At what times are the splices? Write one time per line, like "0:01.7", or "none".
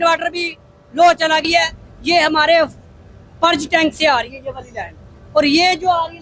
0:01.4